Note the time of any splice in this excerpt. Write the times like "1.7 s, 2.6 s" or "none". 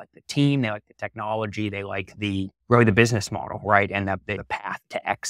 2.6 s